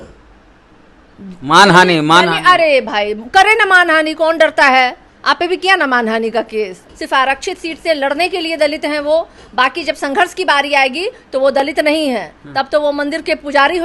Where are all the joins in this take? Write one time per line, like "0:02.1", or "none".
0:06.8